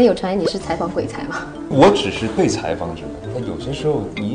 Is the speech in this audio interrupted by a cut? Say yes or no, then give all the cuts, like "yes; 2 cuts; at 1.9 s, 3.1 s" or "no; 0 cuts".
yes; 1 cut; at 1.6 s